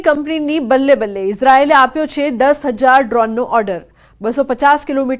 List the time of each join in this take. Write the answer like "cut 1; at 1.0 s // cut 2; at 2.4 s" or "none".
cut 1; at 2.3 s